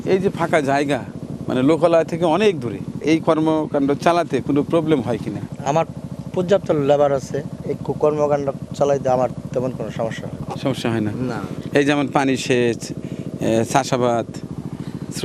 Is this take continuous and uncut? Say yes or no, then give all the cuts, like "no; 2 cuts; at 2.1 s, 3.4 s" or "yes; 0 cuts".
yes; 0 cuts